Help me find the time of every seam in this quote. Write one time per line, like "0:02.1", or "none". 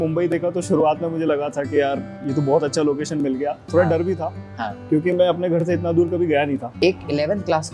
0:06.7